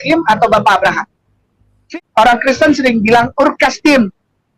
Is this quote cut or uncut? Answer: cut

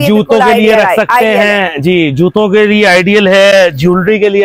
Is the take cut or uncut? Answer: uncut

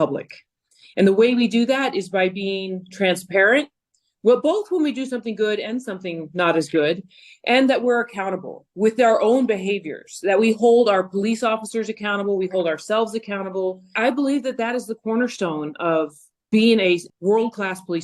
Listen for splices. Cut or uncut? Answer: cut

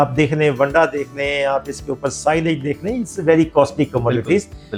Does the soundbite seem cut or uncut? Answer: uncut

